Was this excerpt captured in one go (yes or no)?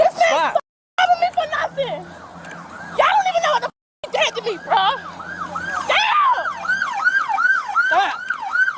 yes